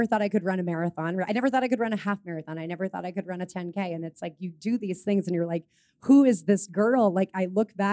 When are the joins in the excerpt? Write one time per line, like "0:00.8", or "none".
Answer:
none